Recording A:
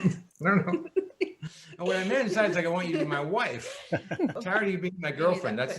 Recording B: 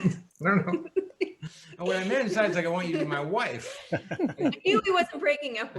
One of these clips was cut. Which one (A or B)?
A